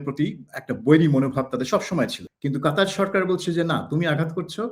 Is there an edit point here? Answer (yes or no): yes